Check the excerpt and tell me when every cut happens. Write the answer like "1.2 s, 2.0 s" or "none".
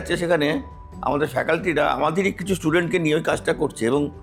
none